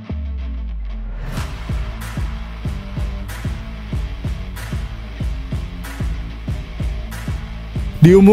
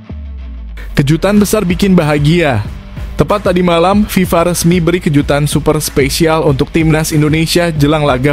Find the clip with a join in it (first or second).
second